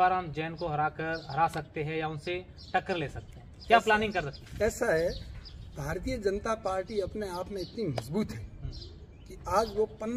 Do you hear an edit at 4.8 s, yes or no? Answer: no